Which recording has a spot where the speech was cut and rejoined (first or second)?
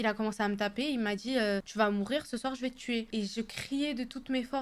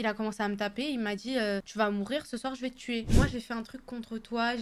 second